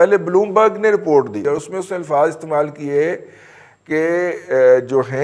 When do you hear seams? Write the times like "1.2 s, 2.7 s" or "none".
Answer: 1.4 s